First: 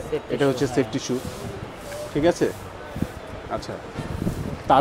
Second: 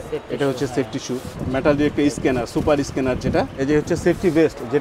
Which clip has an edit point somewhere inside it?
second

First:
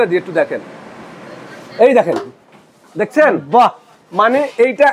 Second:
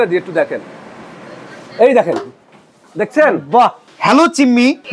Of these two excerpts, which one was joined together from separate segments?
second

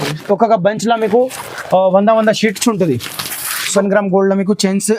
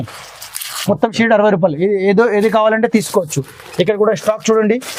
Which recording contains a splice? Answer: first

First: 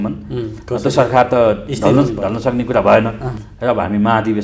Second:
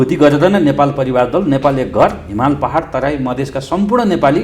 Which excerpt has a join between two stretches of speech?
first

